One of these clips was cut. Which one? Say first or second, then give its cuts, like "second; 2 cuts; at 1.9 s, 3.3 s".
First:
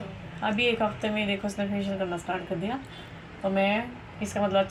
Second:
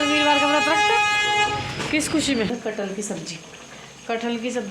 second; 1 cut; at 2.5 s